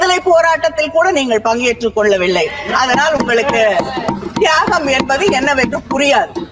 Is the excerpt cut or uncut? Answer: uncut